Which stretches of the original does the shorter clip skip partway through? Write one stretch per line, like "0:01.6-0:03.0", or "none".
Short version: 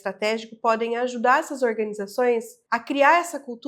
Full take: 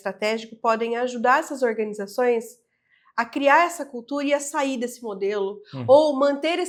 0:02.6-0:03.0